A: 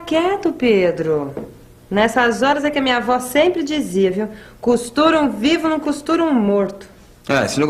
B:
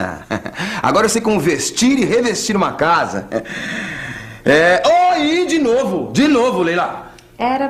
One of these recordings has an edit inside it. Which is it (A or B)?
B